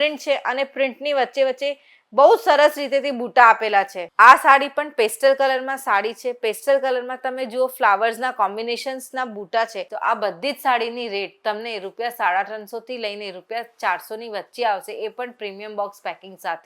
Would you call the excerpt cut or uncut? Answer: cut